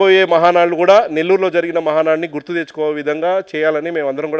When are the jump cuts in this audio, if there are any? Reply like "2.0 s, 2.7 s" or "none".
none